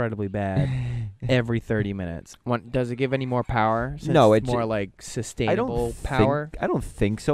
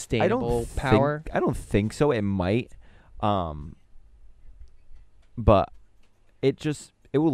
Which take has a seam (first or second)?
first